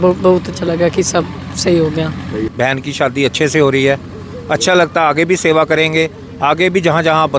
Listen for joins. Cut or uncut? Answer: cut